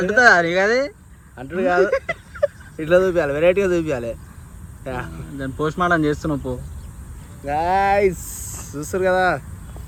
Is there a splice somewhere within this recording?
no; 0 cuts

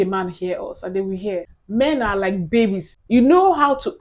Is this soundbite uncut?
no; 2 cuts; at 1.6 s, 2.9 s

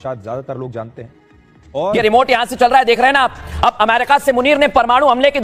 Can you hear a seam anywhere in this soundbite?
yes; 1 cut; at 1.9 s

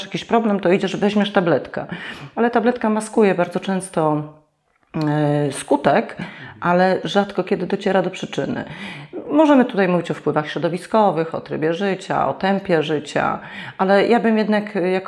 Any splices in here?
no; 0 cuts

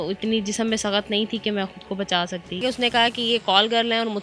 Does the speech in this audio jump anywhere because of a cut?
yes; 1 cut; at 2.6 s

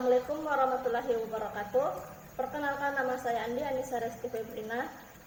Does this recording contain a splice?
no; 0 cuts

